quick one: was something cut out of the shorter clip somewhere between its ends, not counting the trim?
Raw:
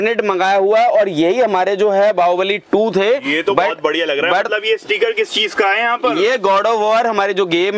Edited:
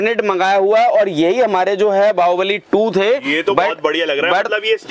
no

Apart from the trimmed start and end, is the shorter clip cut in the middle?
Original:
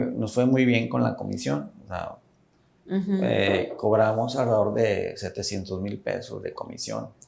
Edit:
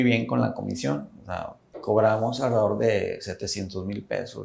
yes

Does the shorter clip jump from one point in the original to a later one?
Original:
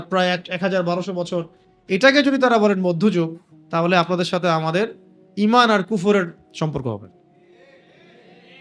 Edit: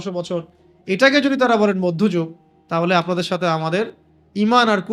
no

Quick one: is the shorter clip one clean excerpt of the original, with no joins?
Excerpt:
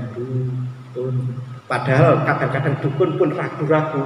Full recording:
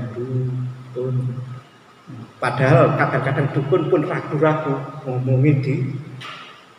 no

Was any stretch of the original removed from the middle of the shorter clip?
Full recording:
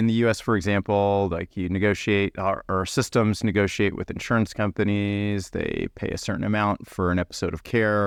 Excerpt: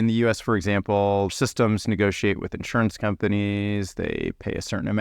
yes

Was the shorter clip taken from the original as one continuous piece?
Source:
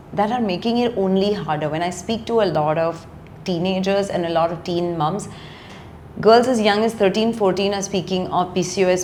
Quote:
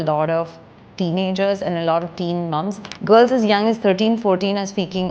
no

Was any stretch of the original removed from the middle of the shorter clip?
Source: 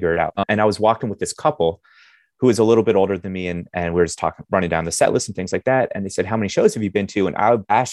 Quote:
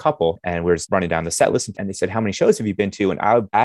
yes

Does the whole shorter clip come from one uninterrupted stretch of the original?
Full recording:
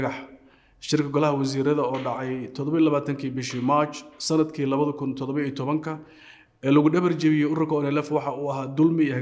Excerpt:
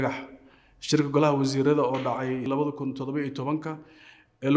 no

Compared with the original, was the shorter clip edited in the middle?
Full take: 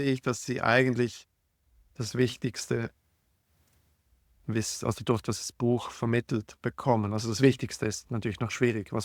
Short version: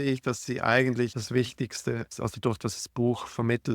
yes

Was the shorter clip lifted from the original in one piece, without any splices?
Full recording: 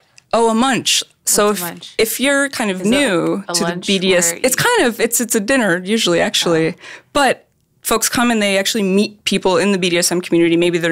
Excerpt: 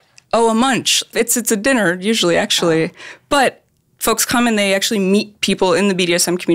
no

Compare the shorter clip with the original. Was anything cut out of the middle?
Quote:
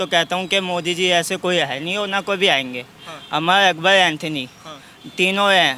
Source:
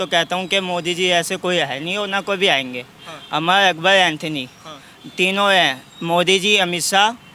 no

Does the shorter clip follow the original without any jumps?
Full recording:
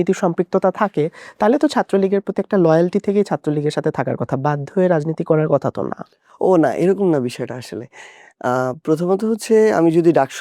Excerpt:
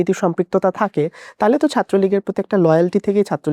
yes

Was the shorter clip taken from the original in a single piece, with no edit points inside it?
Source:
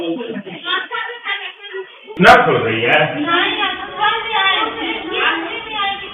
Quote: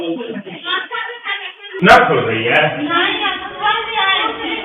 no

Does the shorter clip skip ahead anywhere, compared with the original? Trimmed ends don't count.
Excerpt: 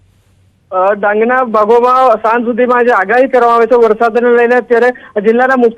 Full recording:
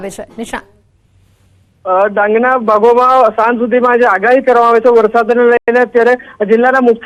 yes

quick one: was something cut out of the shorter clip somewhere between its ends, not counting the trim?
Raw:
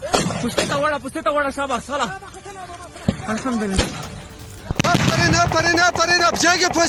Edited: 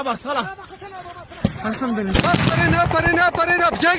yes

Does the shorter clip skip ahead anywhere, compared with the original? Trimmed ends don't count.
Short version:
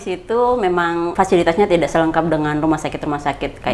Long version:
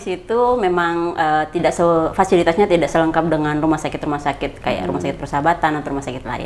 yes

